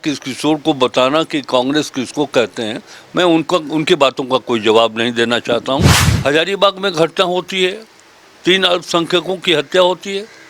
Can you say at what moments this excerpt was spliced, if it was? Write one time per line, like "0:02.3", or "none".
0:06.0